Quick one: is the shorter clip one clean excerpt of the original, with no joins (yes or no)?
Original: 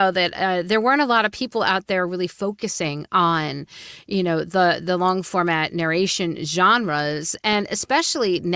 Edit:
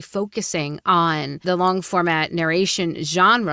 no